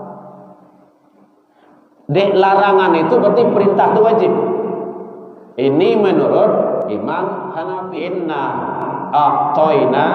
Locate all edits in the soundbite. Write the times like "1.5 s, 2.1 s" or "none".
7.8 s